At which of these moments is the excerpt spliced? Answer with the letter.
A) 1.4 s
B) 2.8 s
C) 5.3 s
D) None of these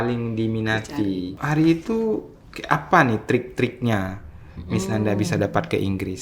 A